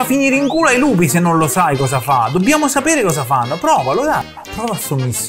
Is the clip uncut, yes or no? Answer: no